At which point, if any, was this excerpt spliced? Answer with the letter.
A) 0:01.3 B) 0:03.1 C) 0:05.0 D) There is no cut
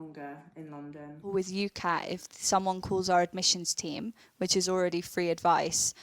A